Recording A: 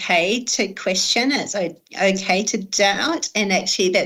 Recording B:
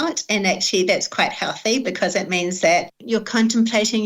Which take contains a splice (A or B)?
B